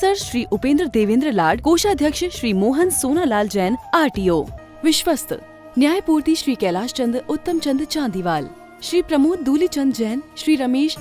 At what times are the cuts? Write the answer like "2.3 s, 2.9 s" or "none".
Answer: 4.6 s